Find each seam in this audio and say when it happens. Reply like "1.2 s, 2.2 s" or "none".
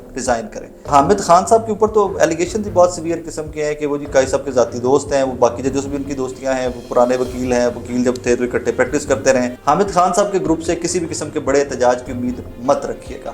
0.9 s, 9.6 s